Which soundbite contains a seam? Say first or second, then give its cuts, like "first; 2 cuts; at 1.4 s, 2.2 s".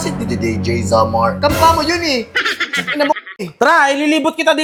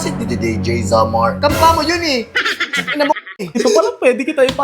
second; 1 cut; at 3.6 s